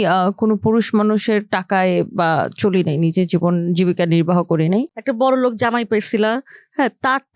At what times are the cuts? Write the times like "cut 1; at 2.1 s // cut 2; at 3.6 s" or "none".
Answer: cut 1; at 4.9 s